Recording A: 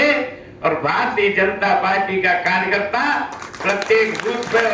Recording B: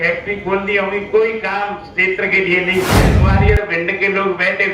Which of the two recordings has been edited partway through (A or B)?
B